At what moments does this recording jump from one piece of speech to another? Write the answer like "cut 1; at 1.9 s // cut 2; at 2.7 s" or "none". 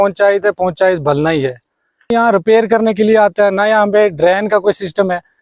cut 1; at 2.1 s